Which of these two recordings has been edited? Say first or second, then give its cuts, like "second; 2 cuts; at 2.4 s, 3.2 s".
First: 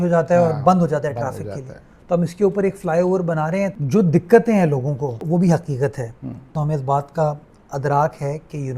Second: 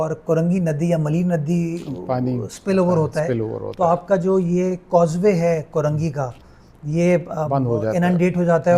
first; 3 cuts; at 3.7 s, 5.2 s, 6.5 s